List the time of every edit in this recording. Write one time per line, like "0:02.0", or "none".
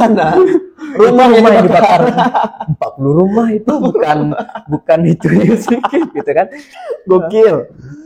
none